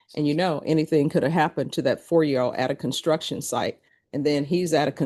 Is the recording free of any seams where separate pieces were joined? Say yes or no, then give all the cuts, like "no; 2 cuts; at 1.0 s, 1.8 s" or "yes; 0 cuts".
yes; 0 cuts